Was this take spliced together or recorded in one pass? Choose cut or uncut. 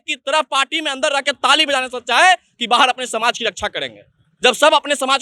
uncut